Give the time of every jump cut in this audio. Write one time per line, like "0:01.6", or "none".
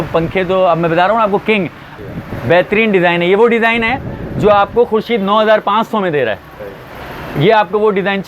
0:01.9